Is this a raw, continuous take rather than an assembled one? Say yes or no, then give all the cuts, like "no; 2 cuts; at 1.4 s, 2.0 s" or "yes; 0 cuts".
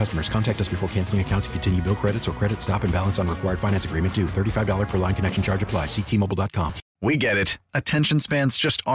no; 1 cut; at 6.8 s